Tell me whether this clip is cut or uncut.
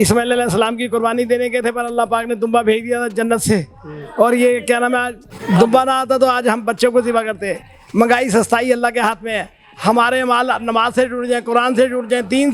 uncut